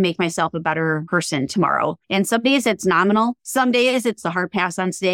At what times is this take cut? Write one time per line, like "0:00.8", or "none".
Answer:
0:01.0
0:02.0
0:03.4
0:04.2